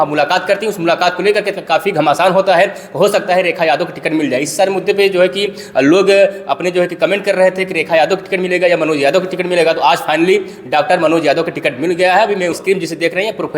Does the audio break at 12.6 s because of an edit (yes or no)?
yes